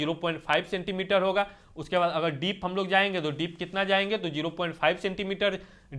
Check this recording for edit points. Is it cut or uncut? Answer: uncut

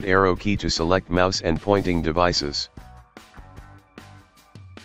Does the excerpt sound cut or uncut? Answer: cut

